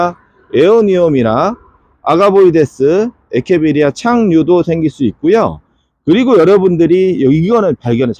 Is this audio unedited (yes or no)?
yes